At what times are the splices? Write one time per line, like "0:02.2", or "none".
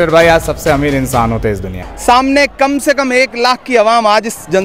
0:01.9